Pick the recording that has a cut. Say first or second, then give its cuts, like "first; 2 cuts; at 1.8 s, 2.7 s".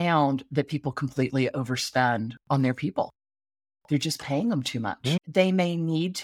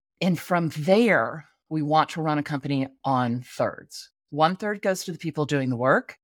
first; 2 cuts; at 2.4 s, 5.2 s